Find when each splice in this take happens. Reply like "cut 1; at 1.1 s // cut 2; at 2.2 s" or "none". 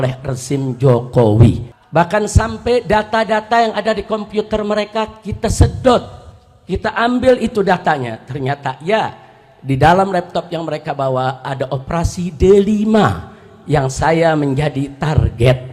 cut 1; at 1.7 s